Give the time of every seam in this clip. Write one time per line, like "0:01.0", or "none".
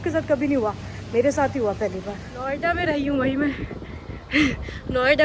0:02.5